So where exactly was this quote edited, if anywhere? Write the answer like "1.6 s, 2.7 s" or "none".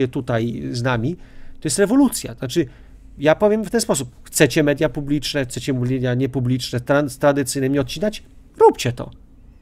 none